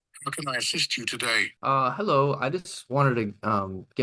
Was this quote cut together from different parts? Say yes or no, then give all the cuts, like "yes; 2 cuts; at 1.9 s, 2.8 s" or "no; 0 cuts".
yes; 1 cut; at 1.5 s